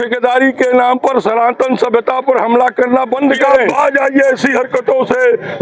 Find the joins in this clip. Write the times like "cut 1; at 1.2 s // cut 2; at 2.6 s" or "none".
cut 1; at 3.7 s